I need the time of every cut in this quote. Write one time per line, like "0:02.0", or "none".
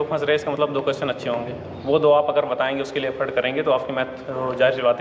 none